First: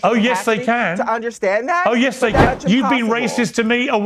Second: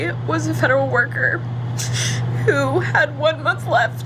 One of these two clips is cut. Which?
first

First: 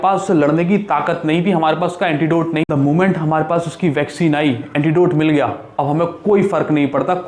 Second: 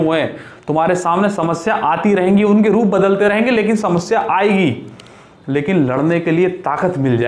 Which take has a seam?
first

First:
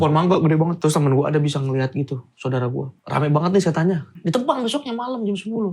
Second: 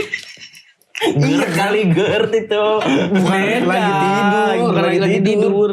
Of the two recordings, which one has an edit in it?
first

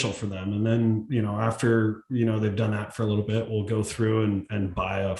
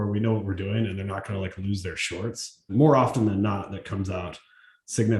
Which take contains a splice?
second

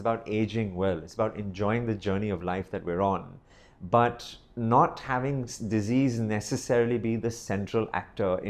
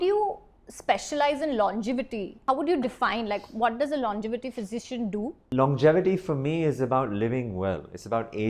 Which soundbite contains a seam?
second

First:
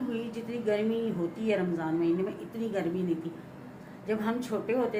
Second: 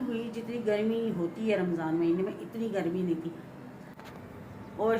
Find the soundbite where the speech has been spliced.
second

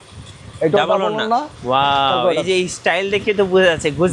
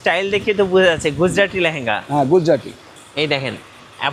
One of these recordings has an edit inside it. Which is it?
first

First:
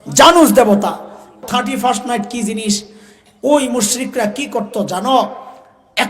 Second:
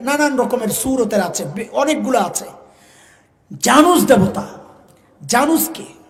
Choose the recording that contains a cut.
first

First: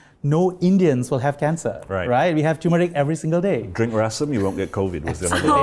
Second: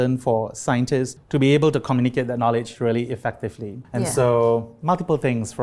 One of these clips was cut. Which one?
second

